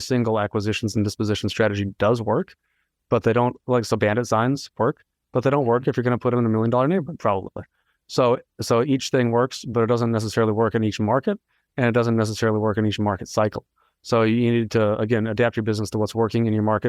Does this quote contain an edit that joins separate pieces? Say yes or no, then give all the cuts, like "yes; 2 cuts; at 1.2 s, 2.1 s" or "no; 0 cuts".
no; 0 cuts